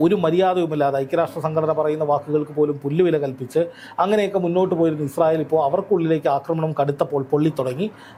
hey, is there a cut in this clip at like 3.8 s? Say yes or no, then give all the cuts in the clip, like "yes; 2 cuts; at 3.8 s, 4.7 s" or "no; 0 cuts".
no; 0 cuts